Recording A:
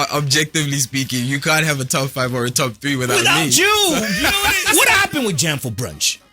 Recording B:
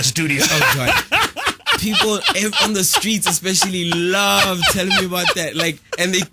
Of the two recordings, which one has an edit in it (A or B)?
A